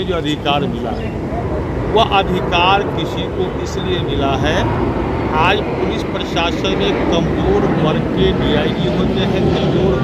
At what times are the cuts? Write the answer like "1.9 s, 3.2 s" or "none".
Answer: none

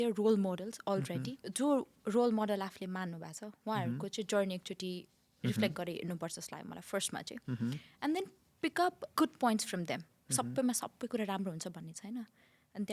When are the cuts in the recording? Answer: 1.4 s, 9.0 s

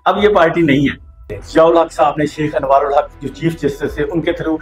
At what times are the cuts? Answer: 1.3 s

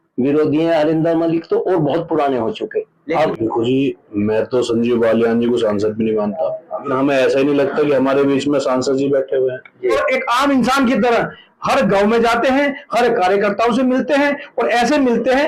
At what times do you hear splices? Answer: 3.3 s, 6.9 s, 10.0 s

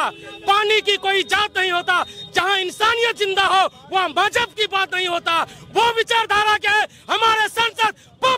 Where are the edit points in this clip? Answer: none

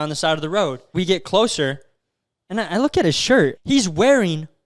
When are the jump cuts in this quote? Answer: 0.9 s, 3.6 s

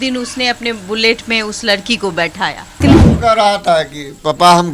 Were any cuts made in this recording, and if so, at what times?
2.8 s

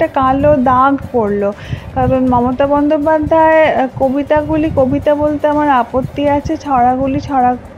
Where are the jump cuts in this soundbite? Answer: none

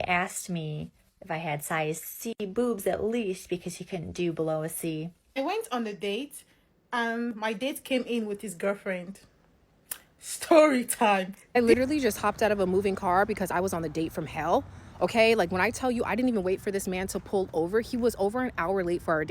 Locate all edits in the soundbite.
5.2 s, 11.4 s

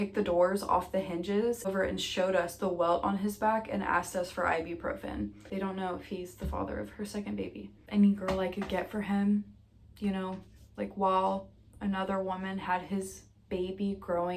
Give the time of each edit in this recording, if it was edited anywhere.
1.7 s, 5.4 s, 7.7 s

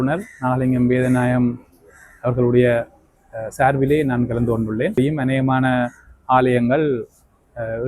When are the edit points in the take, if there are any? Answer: 5.0 s

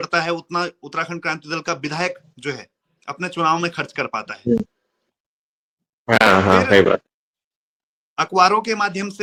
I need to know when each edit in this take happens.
none

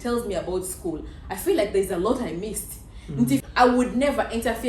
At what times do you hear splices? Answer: 3.4 s

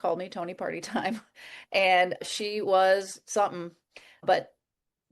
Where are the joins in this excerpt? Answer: 2.2 s, 4.2 s

